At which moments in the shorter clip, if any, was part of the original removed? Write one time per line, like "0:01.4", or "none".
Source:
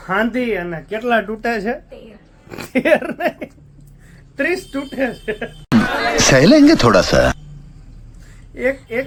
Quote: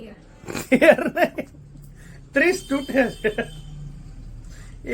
0:03.6